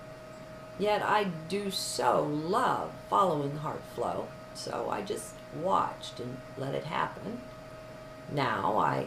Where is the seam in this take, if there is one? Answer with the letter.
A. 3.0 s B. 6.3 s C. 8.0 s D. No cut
A